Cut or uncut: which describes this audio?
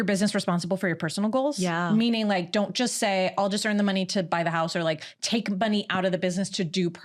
uncut